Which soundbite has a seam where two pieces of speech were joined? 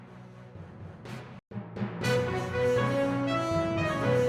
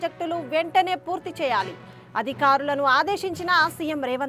first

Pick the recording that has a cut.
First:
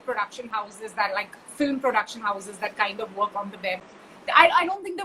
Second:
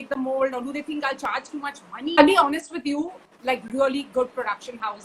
second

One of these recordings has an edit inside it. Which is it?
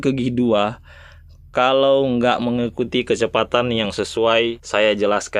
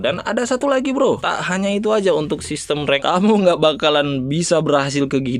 second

